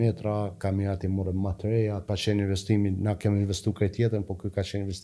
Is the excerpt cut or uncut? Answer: cut